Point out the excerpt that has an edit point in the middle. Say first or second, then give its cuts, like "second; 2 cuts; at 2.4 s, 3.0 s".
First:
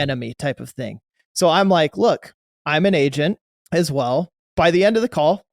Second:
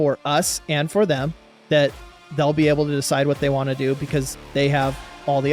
first; 2 cuts; at 3.5 s, 4.4 s